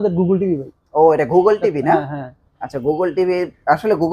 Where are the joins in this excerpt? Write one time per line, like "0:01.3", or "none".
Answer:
none